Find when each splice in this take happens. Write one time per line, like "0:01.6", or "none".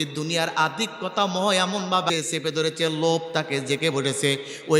0:02.1